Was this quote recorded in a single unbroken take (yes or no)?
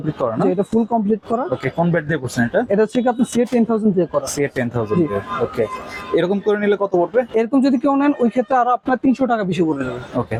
yes